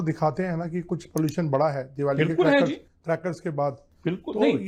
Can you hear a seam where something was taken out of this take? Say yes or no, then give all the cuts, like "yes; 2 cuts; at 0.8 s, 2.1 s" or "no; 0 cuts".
no; 0 cuts